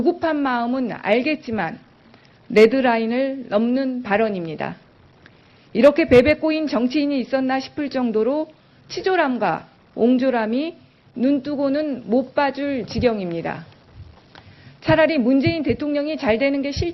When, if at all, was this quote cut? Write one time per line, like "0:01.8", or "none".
0:02.7